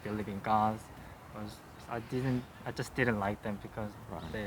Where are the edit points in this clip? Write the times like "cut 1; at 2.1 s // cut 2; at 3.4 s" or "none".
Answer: cut 1; at 1.7 s